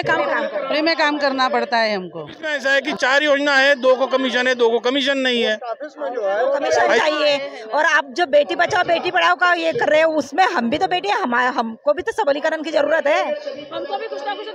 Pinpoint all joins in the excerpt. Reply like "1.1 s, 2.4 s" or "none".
2.5 s, 6.9 s